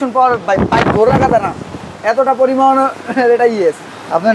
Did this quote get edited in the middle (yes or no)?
no